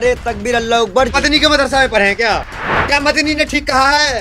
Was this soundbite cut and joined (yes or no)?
yes